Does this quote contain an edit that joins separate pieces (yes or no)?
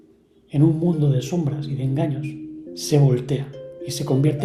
yes